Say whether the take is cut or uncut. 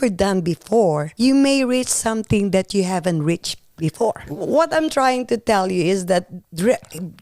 cut